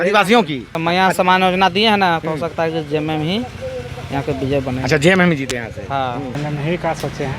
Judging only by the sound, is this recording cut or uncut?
cut